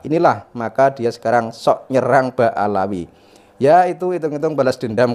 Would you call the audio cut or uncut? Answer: uncut